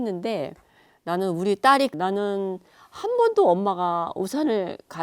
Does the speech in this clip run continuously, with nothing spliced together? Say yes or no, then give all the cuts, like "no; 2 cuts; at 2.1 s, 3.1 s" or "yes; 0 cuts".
no; 1 cut; at 1.9 s